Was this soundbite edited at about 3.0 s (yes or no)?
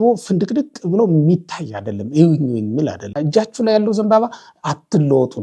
yes